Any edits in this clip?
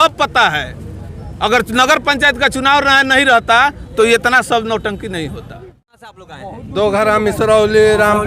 yes; 1 cut; at 6.1 s

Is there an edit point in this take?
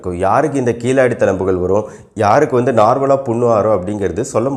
no; 0 cuts

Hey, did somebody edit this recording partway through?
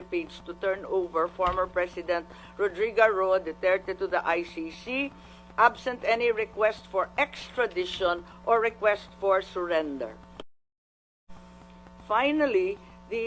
yes; 1 cut; at 11.0 s

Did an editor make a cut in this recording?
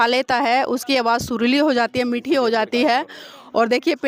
no; 0 cuts

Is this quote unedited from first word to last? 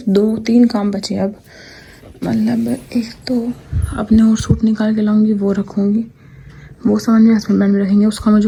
yes; 0 cuts

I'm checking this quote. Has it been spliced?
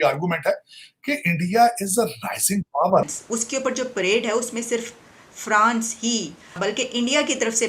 yes; 2 cuts; at 3.0 s, 6.6 s

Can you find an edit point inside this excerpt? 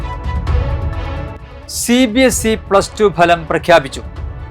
yes; 1 cut; at 1.5 s

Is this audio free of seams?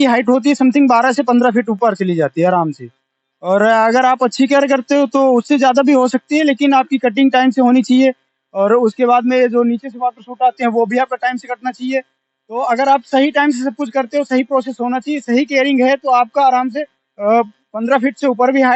yes; 0 cuts

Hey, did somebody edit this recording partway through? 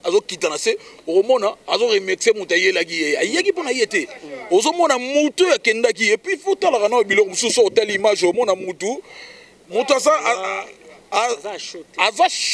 no; 0 cuts

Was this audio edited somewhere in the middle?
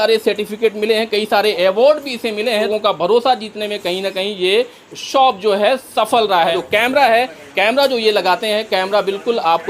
yes; 2 cuts; at 2.7 s, 6.5 s

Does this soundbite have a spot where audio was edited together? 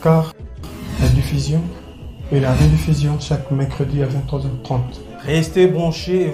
no; 0 cuts

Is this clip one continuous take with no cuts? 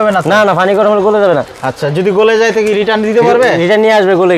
yes; 0 cuts

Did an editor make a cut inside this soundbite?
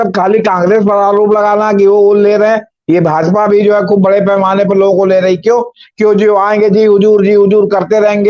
no; 0 cuts

